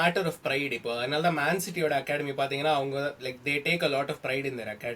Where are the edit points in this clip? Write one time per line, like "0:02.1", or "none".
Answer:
none

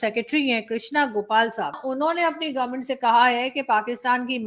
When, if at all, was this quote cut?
0:01.8

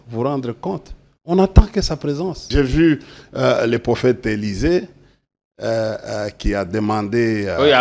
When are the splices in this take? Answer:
0:02.5

